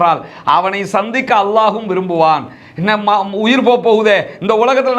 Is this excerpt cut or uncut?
uncut